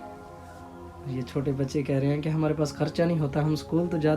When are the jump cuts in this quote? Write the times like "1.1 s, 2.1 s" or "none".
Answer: none